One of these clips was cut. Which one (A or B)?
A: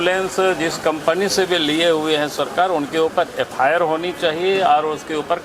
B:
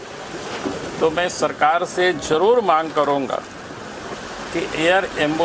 B